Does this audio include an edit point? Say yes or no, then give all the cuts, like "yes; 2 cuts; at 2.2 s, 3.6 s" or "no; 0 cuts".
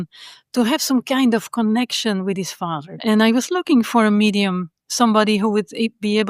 yes; 1 cut; at 3.0 s